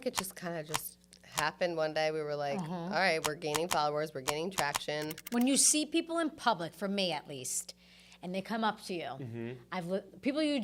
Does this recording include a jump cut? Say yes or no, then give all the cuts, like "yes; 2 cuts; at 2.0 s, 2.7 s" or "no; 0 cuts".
no; 0 cuts